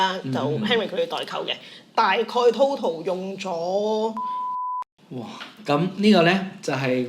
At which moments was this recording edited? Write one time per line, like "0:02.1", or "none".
0:04.5